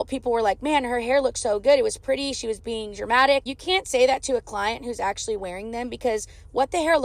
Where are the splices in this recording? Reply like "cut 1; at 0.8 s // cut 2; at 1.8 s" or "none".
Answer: cut 1; at 3.4 s